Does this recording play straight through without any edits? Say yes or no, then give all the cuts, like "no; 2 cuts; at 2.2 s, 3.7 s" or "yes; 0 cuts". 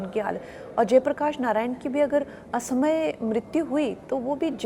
yes; 0 cuts